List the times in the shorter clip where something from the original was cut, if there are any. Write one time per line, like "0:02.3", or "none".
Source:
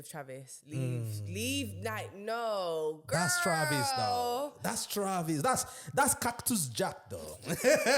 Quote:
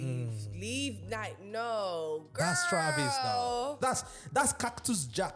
0:03.8